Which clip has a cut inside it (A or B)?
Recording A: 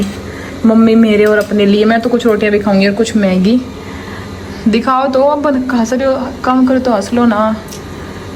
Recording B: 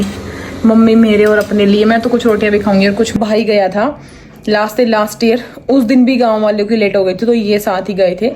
B